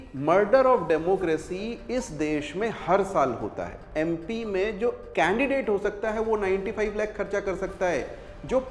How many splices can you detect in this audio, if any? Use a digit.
1